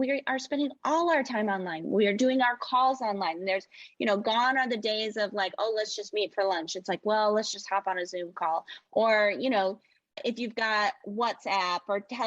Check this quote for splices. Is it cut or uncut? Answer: cut